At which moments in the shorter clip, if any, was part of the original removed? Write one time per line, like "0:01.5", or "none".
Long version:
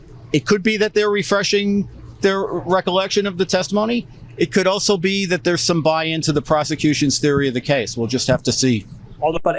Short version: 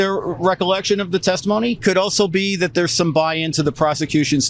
0:01.8